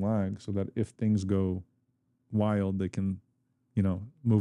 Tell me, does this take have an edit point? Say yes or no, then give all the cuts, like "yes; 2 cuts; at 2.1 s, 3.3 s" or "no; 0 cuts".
no; 0 cuts